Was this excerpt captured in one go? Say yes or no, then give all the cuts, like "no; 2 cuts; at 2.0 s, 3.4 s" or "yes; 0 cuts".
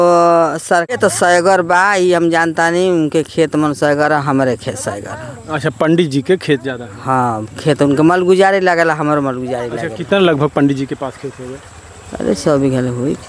no; 1 cut; at 0.9 s